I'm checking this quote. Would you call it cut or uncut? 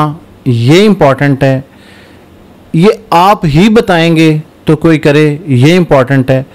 uncut